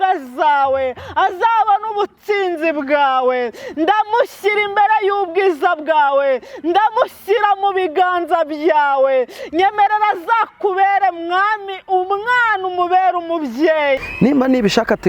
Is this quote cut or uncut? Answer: cut